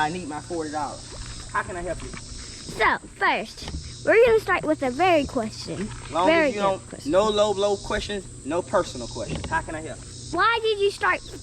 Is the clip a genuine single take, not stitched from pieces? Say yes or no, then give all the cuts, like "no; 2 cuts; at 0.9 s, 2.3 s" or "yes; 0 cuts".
no; 1 cut; at 10.3 s